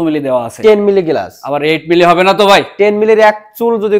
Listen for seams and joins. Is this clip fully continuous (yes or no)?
yes